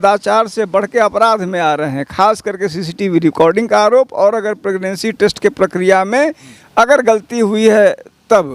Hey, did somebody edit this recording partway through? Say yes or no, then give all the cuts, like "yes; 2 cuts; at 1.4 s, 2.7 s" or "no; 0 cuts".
no; 0 cuts